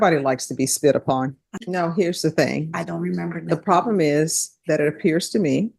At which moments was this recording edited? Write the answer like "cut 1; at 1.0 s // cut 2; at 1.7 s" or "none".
cut 1; at 1.5 s